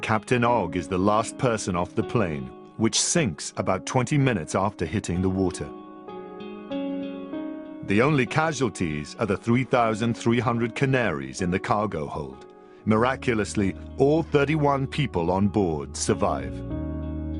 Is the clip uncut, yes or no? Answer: no